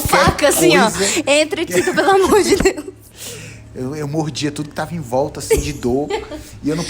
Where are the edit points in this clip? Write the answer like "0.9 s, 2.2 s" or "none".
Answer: none